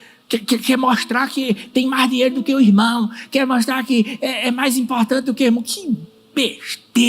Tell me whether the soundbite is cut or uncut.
uncut